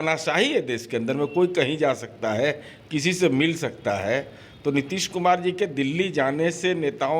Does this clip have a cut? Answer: no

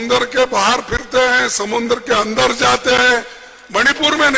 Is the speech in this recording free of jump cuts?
yes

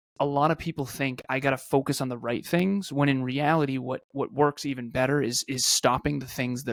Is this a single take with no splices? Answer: yes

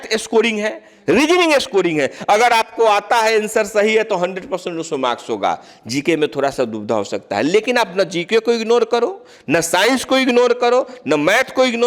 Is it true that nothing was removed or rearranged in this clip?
yes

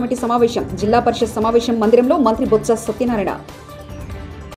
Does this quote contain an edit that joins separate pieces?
no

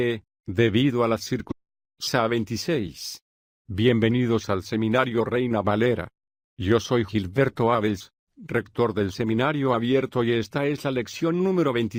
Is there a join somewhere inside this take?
no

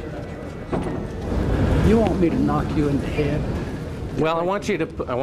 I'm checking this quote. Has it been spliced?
yes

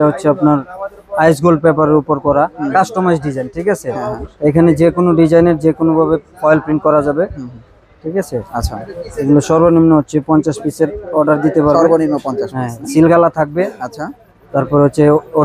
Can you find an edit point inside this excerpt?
no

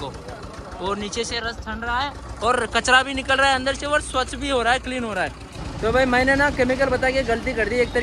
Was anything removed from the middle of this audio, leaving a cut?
yes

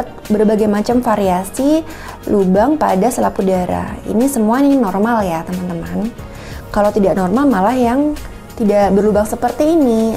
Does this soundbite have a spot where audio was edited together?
no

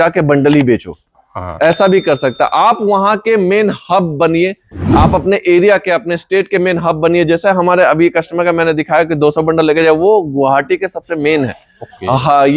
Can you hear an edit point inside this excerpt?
no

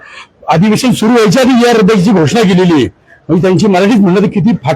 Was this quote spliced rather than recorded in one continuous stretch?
no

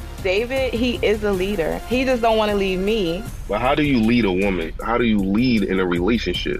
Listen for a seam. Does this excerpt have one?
no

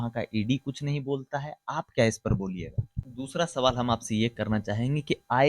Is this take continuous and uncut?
no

